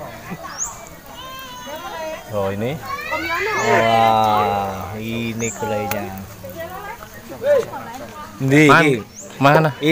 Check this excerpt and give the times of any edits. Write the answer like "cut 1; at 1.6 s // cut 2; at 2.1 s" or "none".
none